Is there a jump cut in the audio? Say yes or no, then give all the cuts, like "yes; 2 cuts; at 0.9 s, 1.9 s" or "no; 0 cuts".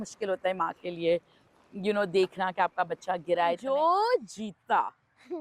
yes; 1 cut; at 3.6 s